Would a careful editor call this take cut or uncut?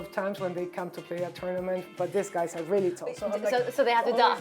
cut